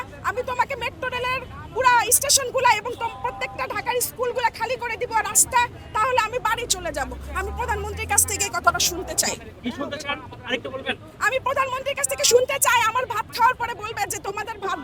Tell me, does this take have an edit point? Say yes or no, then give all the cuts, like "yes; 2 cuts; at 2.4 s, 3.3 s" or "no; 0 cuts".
no; 0 cuts